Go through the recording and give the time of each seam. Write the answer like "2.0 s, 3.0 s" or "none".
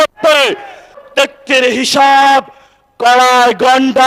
1.0 s